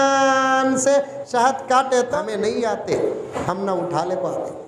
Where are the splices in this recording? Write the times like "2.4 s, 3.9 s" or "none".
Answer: 2.2 s, 3.3 s